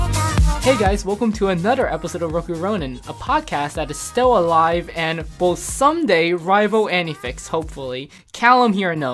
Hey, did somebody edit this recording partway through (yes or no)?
no